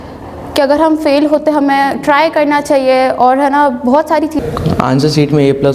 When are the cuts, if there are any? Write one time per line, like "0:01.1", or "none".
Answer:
0:04.4